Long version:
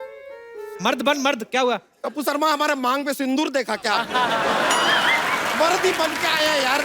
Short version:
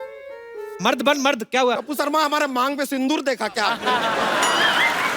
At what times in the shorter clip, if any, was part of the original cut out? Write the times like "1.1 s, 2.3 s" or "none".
1.9 s

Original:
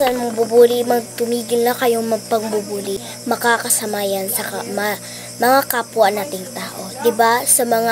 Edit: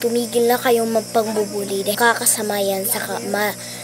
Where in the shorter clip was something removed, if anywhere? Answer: 2.0 s

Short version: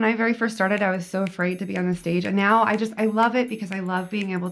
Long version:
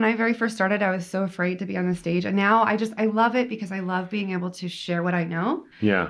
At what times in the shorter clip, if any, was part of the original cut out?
none

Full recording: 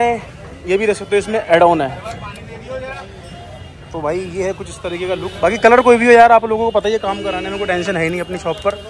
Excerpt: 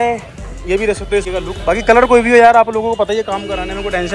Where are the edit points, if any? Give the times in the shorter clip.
1.3 s

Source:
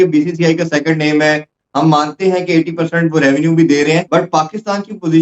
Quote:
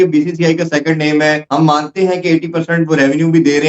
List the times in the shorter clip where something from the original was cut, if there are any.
1.4 s

